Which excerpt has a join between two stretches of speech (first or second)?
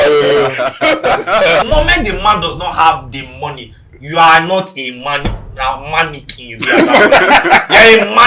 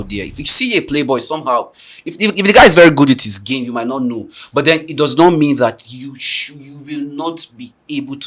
first